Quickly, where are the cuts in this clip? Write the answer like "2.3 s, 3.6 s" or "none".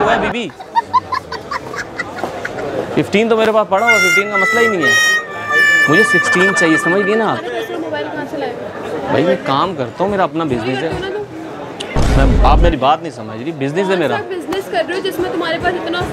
none

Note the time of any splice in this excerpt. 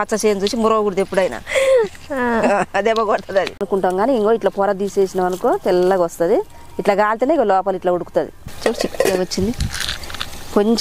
3.6 s, 8.4 s

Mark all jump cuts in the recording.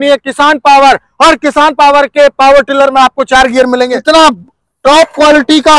3.9 s

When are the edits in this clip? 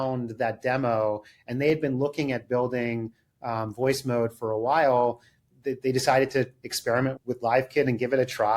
5.5 s

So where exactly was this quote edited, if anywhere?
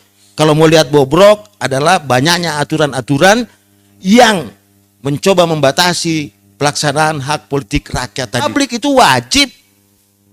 8.5 s

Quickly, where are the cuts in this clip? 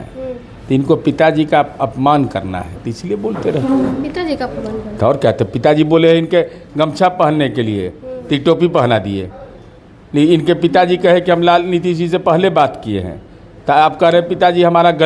none

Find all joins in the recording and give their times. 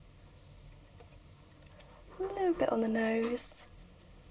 1.8 s

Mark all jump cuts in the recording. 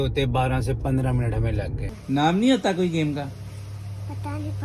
1.9 s

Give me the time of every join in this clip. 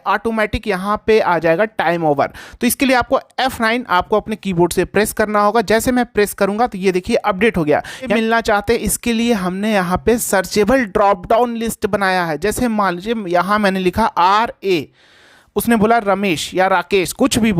8.1 s

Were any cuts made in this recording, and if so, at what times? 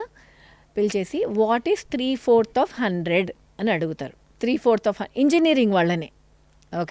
4.2 s

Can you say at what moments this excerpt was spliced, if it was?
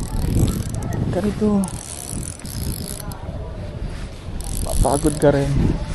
2.5 s

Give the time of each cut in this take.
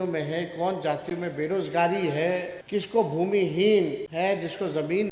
2.6 s, 4.0 s

